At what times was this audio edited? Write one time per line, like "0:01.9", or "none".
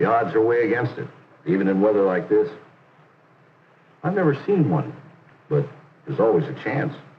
0:05.6